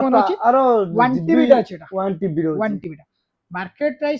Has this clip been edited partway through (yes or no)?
no